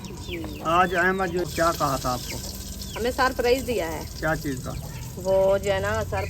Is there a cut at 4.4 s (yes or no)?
no